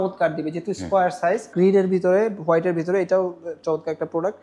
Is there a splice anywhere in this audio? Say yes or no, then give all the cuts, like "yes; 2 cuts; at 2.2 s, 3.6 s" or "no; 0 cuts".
yes; 1 cut; at 1.5 s